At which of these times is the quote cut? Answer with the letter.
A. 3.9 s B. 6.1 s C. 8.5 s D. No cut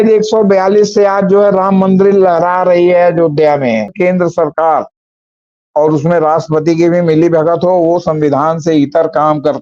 A